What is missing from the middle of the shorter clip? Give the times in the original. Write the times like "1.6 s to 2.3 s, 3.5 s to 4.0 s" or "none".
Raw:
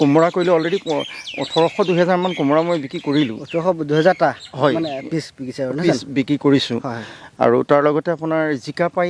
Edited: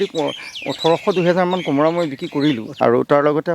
3.4 s to 7.3 s